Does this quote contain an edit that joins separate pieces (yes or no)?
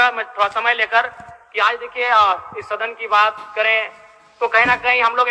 no